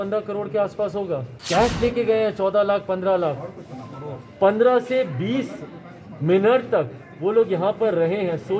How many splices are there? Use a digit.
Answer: 1